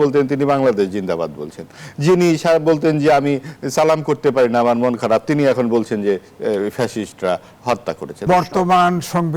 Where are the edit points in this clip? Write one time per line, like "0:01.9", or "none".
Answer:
0:08.2

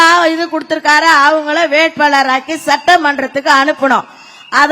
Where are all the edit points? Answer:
none

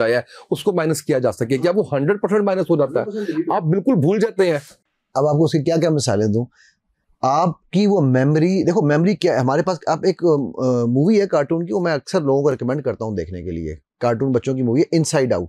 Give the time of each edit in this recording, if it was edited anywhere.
none

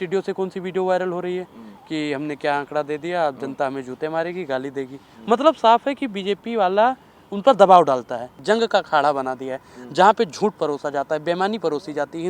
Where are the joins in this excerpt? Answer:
0:08.3

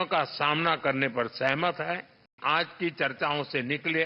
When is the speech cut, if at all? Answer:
0:02.4

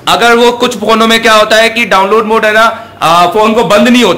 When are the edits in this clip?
none

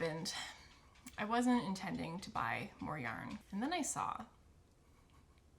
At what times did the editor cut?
0:03.4

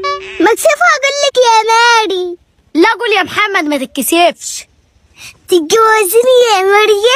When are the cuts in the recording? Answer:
none

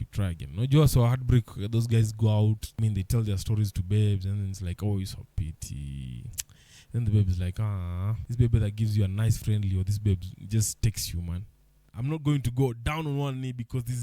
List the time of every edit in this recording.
0:02.7
0:08.2
0:11.9

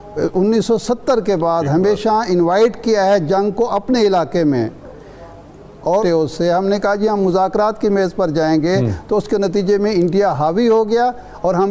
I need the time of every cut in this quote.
0:06.0

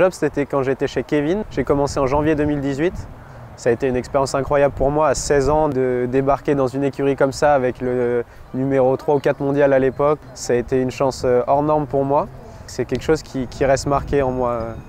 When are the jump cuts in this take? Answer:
0:01.4
0:10.2
0:12.7

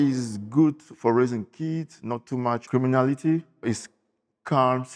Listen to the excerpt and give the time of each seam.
0:02.6
0:03.6

